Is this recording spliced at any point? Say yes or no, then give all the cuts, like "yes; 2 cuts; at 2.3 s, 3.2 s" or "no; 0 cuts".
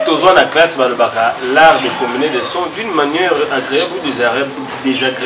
no; 0 cuts